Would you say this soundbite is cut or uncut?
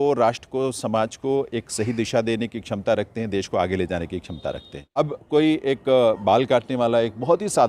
cut